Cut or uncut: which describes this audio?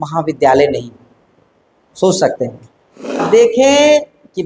cut